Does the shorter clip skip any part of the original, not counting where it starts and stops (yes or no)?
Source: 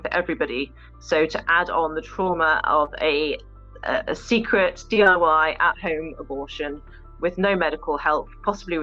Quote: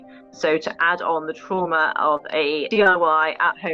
yes